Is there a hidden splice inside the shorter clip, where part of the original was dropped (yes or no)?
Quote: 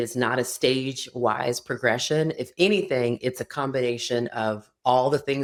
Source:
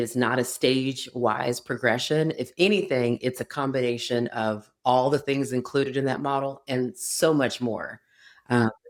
no